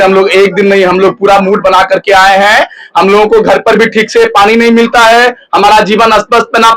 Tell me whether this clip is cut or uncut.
uncut